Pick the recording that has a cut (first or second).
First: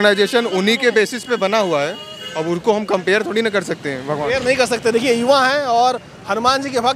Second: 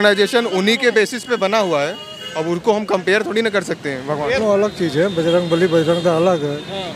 second